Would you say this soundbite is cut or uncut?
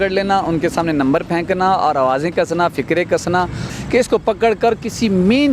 cut